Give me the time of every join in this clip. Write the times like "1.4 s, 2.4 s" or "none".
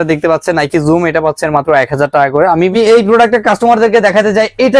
2.7 s